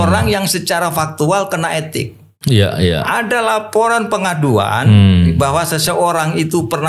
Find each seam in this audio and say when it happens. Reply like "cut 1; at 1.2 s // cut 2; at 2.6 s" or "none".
none